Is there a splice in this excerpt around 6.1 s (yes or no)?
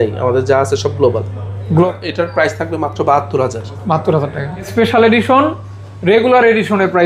no